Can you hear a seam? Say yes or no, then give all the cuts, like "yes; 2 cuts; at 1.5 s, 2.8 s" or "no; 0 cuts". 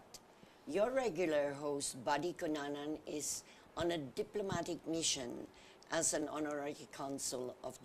yes; 1 cut; at 2.8 s